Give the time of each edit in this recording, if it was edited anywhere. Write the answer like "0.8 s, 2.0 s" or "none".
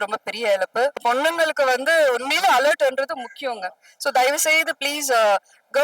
1.0 s